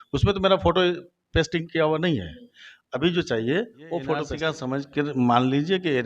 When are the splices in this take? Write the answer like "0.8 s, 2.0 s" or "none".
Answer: 4.4 s